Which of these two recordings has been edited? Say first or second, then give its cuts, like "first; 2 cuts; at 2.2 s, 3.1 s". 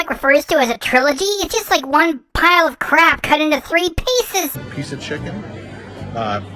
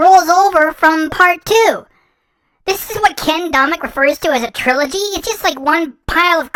first; 1 cut; at 4.6 s